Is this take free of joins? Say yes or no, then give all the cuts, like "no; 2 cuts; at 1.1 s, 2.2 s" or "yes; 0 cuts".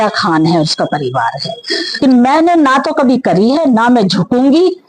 no; 1 cut; at 2.0 s